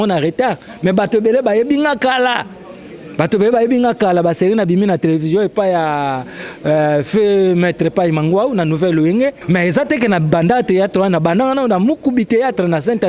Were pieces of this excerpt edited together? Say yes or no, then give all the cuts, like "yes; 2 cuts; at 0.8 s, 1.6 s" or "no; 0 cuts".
yes; 1 cut; at 9.4 s